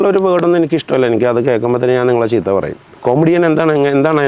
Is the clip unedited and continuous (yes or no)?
no